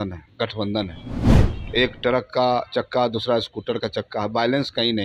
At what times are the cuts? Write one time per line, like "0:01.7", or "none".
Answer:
none